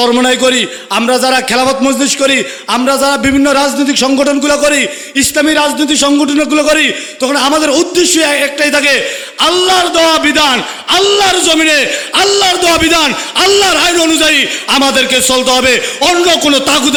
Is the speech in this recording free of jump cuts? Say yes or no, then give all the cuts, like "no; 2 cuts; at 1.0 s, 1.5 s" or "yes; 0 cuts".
yes; 0 cuts